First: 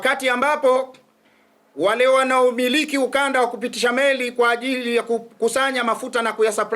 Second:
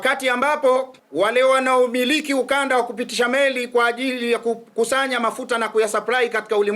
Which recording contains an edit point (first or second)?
second